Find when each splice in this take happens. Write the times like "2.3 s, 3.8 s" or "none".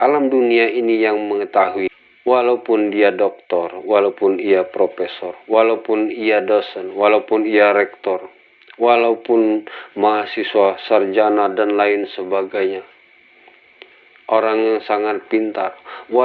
1.9 s